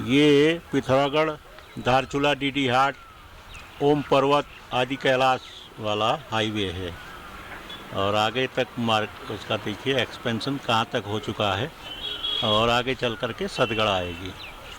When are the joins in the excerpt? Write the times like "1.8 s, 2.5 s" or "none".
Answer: none